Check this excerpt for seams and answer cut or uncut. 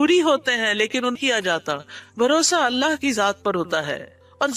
cut